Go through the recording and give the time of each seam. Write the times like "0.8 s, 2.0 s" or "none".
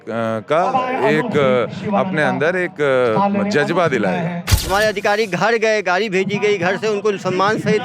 4.5 s